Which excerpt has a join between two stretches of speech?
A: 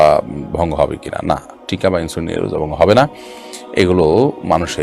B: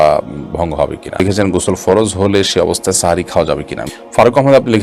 B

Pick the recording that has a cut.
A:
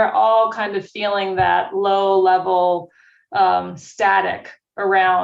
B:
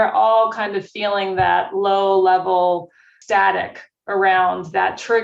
B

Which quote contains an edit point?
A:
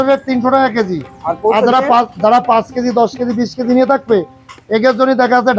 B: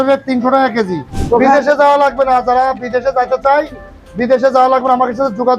B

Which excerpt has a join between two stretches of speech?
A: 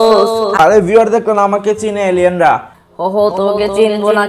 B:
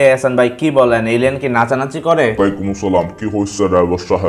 B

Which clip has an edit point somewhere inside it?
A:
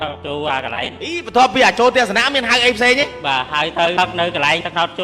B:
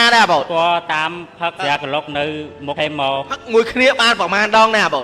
B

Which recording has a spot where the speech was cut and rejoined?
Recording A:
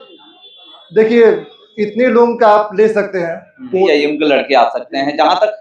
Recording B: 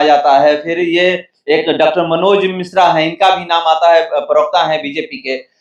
A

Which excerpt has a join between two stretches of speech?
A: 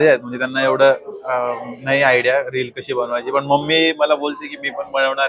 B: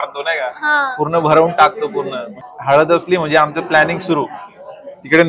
B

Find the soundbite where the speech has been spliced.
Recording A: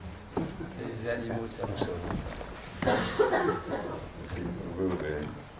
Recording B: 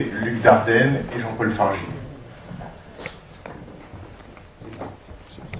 B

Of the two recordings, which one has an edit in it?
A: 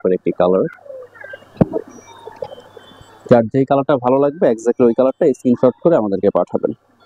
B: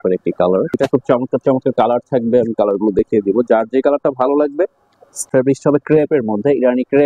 B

